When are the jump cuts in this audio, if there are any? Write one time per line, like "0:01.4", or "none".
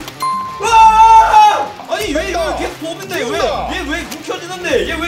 0:01.9

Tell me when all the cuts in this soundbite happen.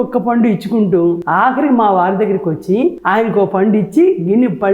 0:01.2
0:03.0

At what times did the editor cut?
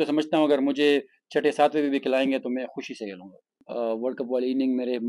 0:03.6

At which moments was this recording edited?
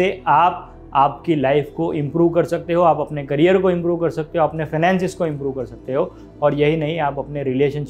none

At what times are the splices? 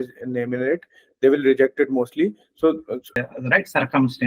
0:03.2

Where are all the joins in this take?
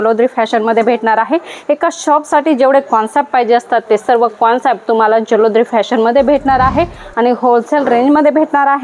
none

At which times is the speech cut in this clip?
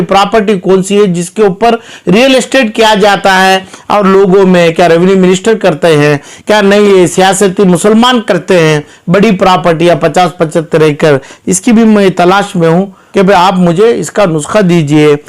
0:13.0

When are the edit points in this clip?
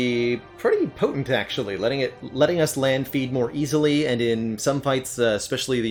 none

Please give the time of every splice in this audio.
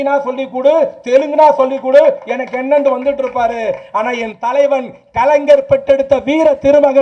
none

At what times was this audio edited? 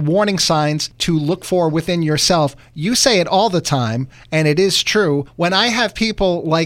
0:00.9
0:05.3

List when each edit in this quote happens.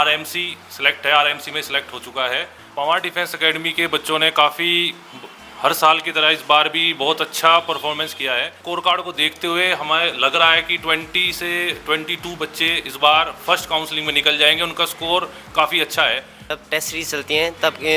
0:02.6
0:08.6
0:16.6

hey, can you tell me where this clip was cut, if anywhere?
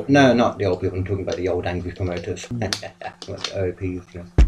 0:02.5

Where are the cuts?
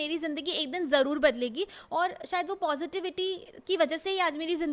none

